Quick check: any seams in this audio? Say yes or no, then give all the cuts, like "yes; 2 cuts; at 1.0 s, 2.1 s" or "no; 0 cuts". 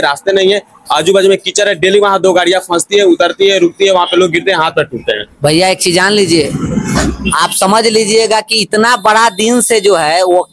no; 0 cuts